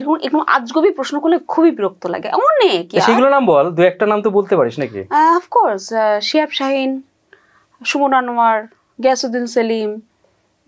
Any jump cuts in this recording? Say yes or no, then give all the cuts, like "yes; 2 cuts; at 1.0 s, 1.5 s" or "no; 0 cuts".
no; 0 cuts